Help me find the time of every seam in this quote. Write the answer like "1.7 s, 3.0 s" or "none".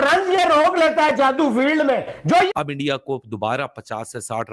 2.5 s